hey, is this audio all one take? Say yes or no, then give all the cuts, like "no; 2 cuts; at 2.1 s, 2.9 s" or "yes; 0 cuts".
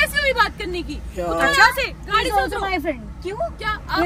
yes; 0 cuts